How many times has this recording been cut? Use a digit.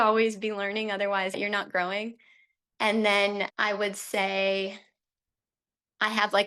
1